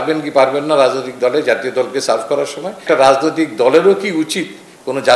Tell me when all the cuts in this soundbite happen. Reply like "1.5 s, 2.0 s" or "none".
2.8 s